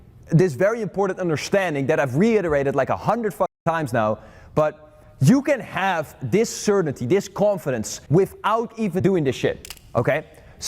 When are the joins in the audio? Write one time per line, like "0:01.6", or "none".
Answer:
0:08.0
0:09.0
0:09.7

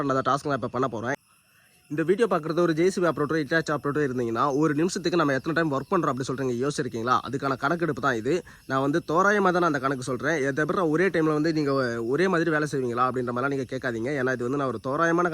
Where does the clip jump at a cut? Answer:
0:01.2

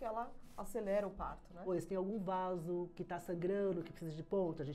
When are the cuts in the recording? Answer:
0:01.7

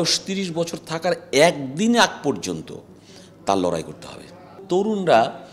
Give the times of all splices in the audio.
0:04.6

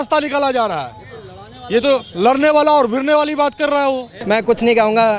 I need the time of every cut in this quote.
0:04.1

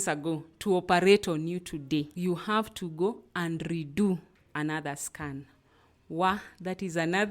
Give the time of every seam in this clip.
0:02.1

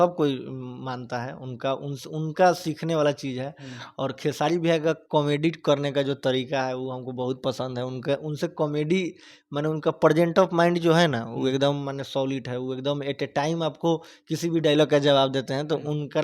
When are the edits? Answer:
none

